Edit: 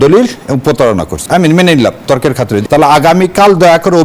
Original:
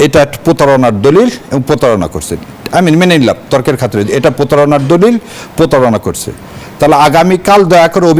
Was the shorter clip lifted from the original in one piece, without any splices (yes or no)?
no